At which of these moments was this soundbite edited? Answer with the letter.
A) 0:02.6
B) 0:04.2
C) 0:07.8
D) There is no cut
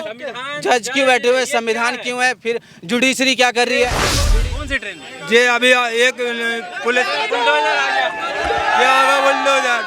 B